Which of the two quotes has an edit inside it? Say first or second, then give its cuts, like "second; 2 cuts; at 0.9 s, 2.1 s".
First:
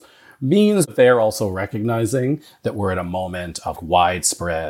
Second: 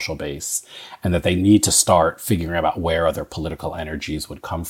first; 2 cuts; at 0.9 s, 3.8 s